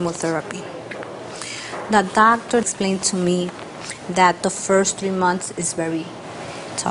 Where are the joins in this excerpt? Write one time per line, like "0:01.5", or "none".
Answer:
0:02.6